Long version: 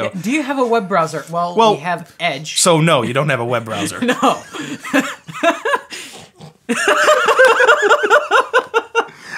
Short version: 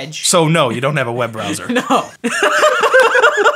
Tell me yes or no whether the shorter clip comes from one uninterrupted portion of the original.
no